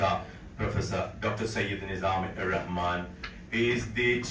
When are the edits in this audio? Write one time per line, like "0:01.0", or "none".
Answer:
none